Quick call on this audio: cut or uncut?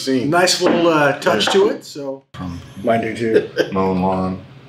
cut